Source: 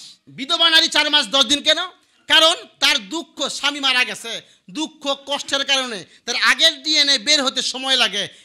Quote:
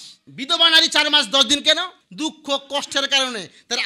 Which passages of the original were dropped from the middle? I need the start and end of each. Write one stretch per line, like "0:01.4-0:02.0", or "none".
0:02.0-0:04.6